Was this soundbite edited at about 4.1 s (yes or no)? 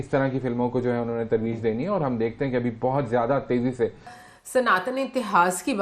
yes